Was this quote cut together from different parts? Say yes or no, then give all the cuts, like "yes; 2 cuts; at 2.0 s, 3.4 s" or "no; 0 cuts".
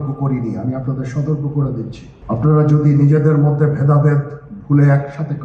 yes; 1 cut; at 2.1 s